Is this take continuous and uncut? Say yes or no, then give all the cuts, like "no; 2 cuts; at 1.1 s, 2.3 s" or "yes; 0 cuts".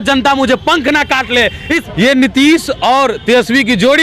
no; 1 cut; at 1.8 s